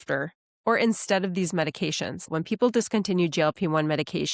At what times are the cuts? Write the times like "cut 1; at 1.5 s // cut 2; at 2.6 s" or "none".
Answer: cut 1; at 2.3 s